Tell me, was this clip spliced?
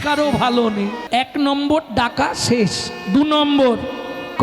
yes; 1 cut; at 1.0 s

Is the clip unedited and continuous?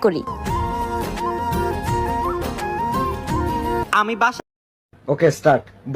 no; 1 cut; at 4.5 s

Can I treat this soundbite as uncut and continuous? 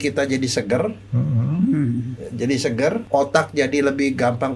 no; 1 cut; at 3.0 s

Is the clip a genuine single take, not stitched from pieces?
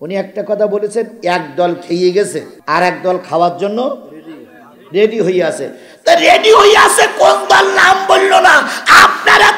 no; 1 cut; at 2.5 s

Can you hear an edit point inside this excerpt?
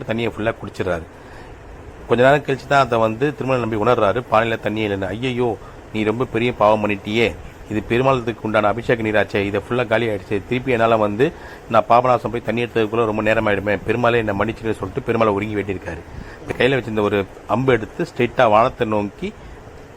yes; 1 cut; at 16.5 s

